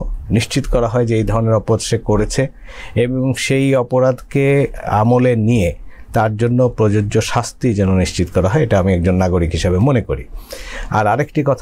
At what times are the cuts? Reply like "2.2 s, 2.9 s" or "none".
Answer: none